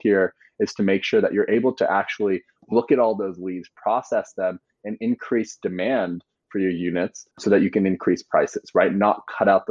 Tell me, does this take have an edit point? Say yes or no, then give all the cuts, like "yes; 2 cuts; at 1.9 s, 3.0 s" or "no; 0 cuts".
no; 0 cuts